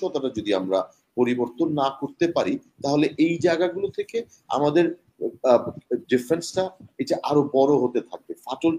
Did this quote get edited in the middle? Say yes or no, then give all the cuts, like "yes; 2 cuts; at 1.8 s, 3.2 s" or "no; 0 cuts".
no; 0 cuts